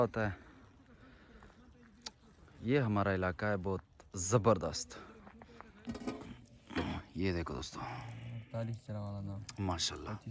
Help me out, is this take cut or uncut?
cut